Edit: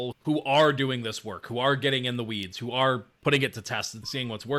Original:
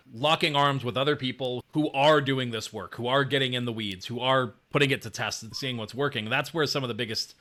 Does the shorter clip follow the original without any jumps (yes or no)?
yes